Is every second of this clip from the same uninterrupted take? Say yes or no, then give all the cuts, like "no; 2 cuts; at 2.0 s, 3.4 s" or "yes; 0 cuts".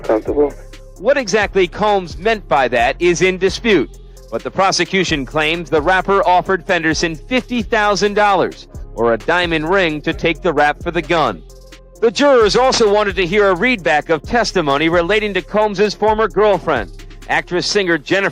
yes; 0 cuts